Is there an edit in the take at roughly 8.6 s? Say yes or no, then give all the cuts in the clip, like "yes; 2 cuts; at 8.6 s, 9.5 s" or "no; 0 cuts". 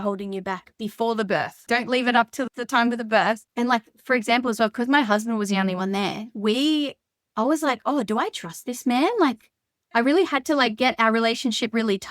no; 3 cuts; at 1.6 s, 2.5 s, 3.5 s